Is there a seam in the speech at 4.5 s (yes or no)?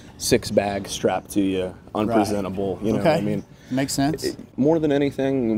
yes